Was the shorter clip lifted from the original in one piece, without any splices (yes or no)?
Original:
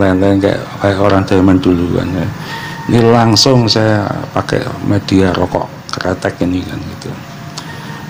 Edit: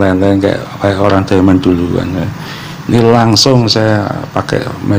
yes